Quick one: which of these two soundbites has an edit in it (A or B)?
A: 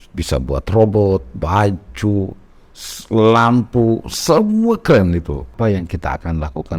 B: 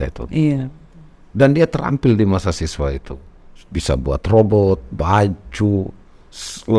A